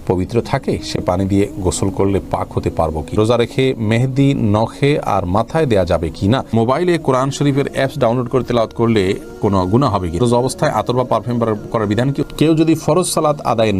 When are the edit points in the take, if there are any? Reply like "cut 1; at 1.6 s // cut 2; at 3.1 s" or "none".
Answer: cut 1; at 3.1 s // cut 2; at 6.5 s // cut 3; at 10.2 s // cut 4; at 12.2 s